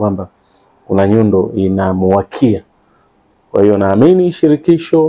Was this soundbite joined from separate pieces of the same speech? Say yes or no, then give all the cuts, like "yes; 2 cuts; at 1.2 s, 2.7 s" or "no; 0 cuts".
no; 0 cuts